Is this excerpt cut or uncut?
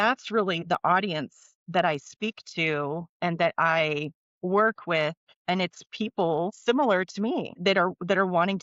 cut